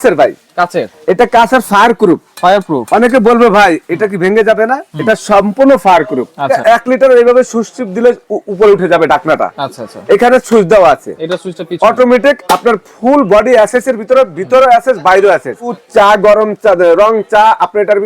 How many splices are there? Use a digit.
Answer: 2